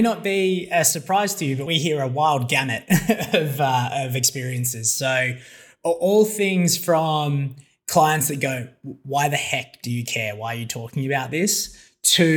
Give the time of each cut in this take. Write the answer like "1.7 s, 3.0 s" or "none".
1.6 s